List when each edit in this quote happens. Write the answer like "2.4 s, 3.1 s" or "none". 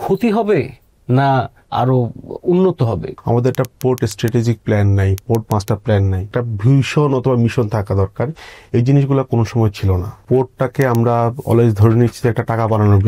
1.6 s, 3.1 s, 5.2 s, 6.2 s, 10.1 s